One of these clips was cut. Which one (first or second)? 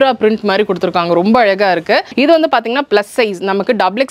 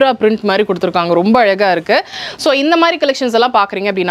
first